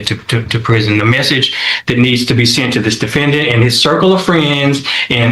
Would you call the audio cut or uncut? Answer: uncut